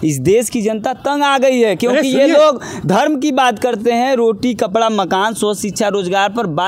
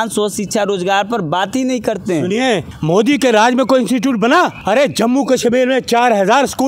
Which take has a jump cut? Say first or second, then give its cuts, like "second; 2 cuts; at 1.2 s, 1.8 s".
second; 2 cuts; at 2.7 s, 4.6 s